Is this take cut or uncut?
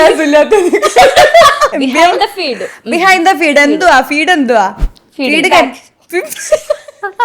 cut